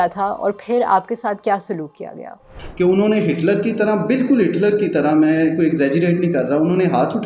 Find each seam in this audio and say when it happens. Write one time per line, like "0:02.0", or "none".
0:02.2